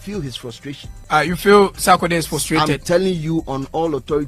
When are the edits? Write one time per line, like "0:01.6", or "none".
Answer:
0:00.9